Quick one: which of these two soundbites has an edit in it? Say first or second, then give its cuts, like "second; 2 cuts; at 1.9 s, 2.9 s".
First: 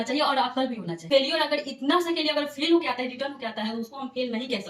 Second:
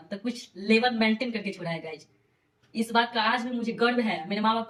first; 1 cut; at 1.1 s